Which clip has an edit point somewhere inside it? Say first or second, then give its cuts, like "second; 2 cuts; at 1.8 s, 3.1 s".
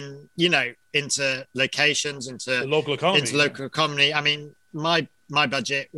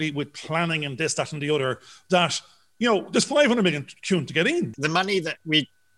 second; 1 cut; at 4.8 s